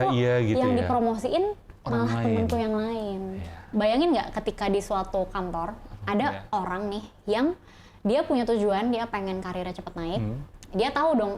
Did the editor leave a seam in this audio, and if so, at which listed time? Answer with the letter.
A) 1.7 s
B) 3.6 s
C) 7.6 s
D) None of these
B